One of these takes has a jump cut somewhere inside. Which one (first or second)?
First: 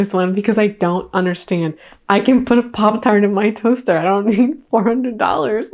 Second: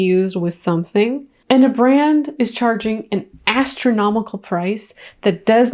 second